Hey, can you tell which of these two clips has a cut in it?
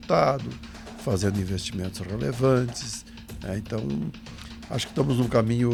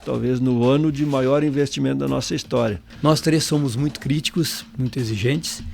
second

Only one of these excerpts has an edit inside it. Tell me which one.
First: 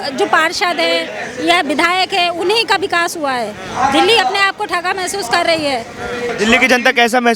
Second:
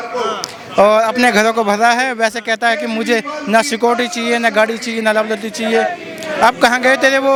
first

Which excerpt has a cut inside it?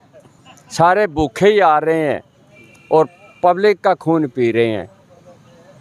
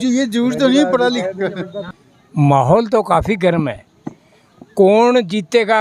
second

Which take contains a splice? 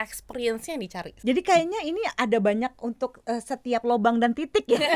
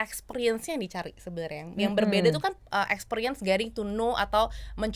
first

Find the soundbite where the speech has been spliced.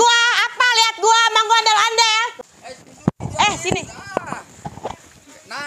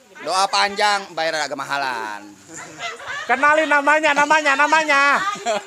first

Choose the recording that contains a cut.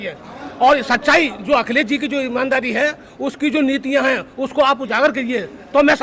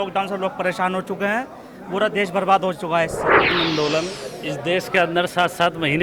second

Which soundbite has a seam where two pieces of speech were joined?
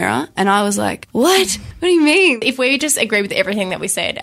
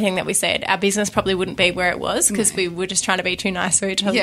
first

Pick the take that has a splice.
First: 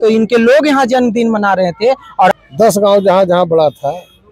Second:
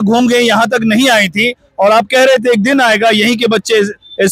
first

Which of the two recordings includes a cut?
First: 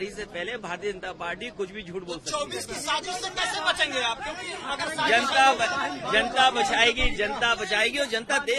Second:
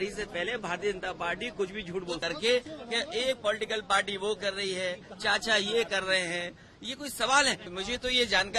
second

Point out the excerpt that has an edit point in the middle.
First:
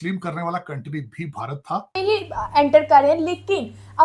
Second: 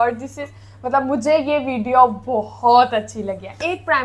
first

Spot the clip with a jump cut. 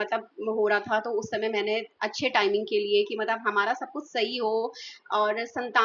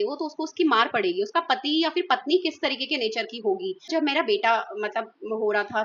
second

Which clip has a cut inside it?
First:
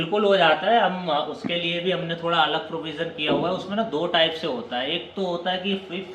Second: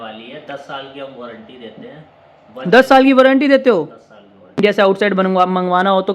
second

